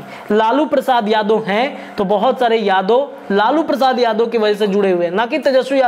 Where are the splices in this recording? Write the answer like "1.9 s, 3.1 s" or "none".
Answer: none